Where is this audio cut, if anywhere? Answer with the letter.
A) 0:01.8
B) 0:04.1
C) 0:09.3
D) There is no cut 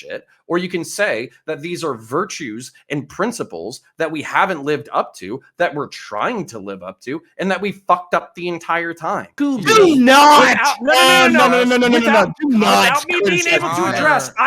C